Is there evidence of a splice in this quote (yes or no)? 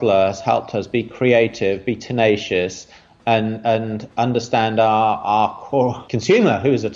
yes